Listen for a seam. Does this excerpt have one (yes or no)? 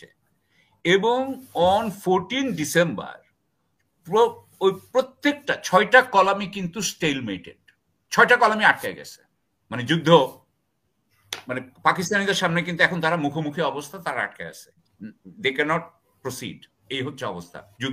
no